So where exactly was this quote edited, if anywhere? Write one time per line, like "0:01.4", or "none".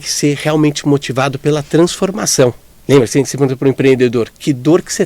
0:02.7